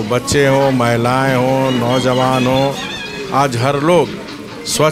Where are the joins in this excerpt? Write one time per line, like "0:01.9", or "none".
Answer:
none